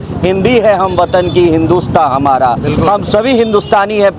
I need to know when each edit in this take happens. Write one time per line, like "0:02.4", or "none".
none